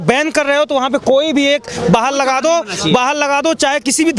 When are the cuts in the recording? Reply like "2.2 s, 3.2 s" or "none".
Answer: none